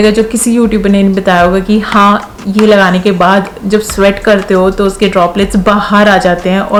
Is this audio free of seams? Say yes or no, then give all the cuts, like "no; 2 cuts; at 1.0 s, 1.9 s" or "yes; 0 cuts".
yes; 0 cuts